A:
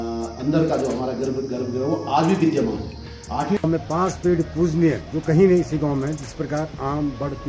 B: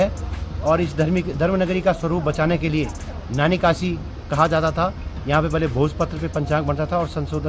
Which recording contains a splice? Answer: A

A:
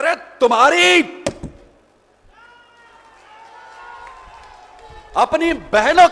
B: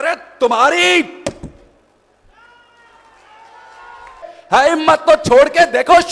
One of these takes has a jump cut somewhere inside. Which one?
B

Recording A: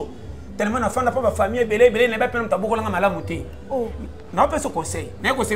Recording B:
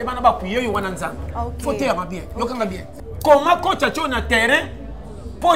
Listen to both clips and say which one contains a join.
B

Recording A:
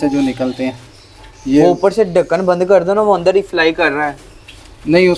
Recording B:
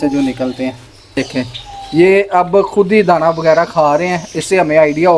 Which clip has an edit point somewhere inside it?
B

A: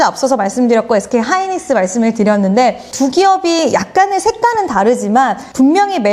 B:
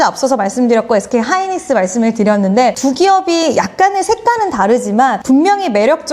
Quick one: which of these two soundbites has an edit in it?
B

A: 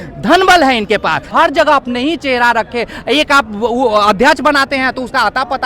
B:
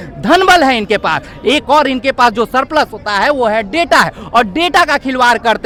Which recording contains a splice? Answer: A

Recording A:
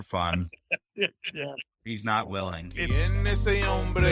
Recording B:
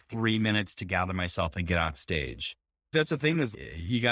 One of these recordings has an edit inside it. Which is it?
A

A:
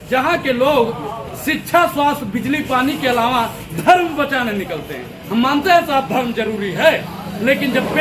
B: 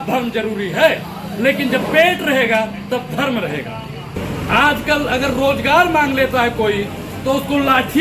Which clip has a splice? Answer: B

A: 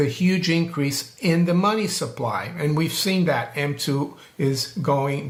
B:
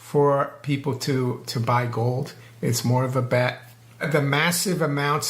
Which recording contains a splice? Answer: B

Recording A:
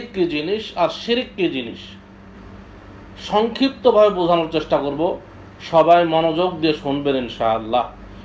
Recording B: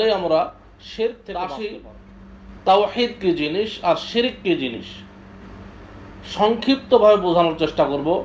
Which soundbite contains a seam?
B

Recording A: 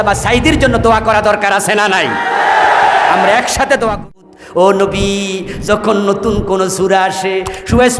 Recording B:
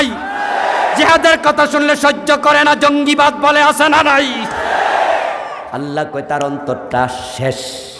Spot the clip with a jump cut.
A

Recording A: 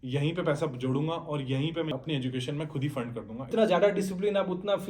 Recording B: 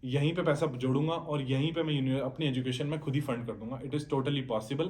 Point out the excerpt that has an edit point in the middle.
A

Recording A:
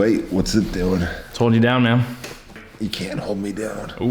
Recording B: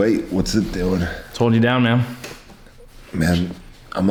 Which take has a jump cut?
A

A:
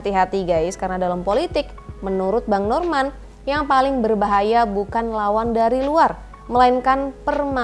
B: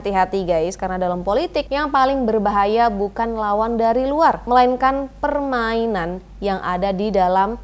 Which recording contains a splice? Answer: B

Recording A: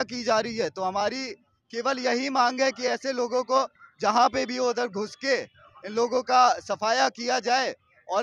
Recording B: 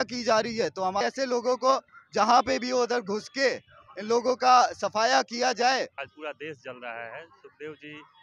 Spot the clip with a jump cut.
B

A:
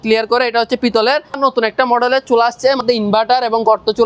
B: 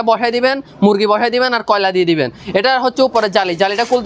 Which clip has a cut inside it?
A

